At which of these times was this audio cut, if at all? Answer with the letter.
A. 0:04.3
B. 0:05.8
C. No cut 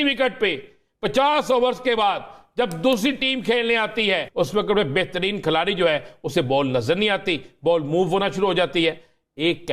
A